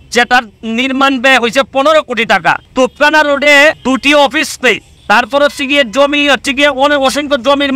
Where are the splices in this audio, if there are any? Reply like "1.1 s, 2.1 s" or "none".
2.6 s, 3.8 s, 4.9 s